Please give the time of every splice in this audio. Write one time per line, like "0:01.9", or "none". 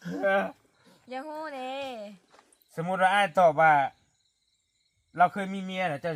none